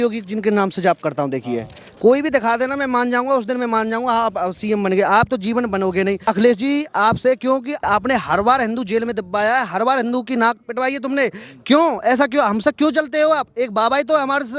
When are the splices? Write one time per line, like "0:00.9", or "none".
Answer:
0:06.2
0:07.8